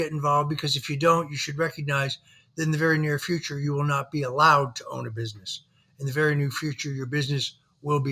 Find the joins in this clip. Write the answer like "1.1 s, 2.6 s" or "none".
none